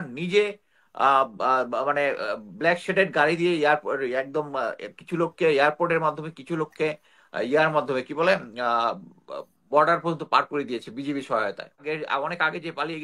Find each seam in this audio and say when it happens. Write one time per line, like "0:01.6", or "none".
0:11.8